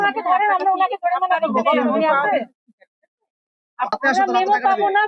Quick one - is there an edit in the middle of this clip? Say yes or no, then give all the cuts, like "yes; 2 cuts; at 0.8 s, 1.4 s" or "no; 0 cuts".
yes; 1 cut; at 3.9 s